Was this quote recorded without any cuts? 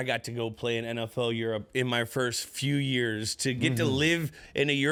yes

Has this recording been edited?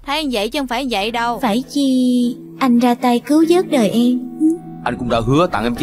yes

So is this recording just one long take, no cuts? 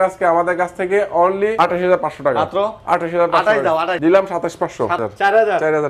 no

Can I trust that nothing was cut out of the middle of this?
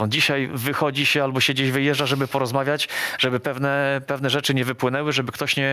yes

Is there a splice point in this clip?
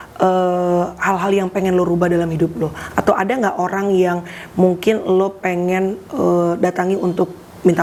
no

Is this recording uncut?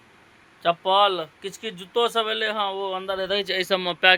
yes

